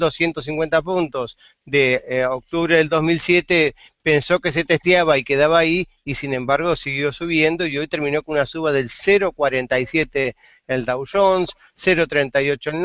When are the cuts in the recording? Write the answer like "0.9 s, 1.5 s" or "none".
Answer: 4.4 s